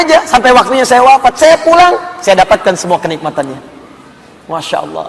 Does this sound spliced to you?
no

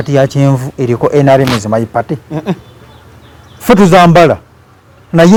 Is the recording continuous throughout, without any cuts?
yes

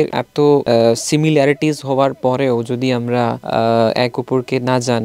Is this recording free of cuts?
yes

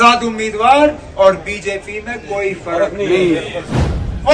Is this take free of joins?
yes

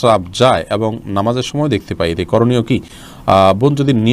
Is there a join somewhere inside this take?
no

